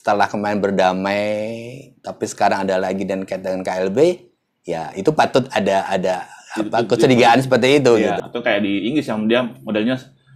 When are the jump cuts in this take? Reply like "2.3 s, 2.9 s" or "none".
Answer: 8.2 s